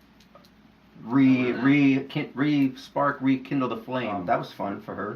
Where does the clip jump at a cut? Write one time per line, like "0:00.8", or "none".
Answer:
0:04.2